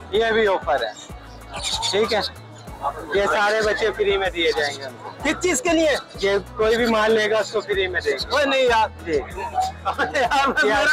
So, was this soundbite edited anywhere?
no; 0 cuts

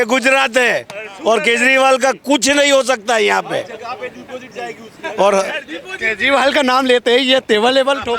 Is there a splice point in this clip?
no; 0 cuts

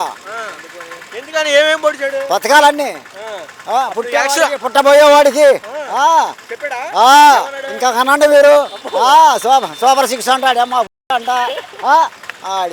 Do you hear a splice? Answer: no; 0 cuts

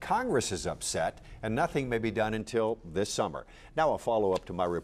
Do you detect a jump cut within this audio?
no; 0 cuts

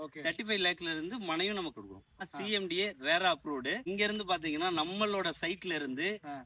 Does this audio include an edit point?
yes; 2 cuts; at 2.3 s, 3.8 s

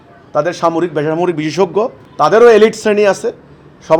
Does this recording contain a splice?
yes; 1 cut; at 2.0 s

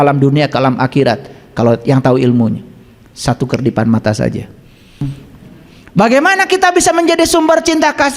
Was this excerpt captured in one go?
no; 1 cut; at 5.0 s

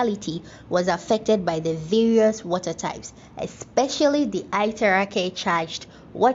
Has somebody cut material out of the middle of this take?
no; 0 cuts

